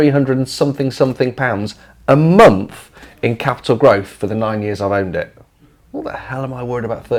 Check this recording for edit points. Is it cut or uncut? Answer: uncut